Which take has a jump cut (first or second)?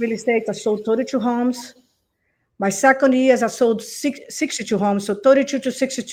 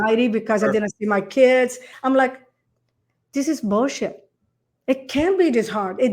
second